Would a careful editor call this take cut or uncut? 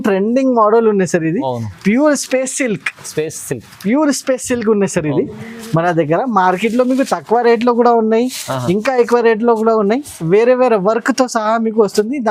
uncut